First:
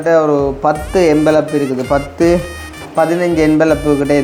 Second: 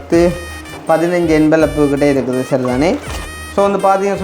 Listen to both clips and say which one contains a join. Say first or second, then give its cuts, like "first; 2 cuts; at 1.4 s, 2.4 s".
second; 1 cut; at 3.1 s